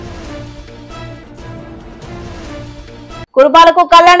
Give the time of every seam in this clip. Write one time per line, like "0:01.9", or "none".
0:03.3